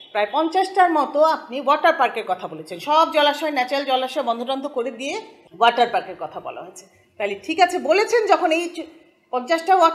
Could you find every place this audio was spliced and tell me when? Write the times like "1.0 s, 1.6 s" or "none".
none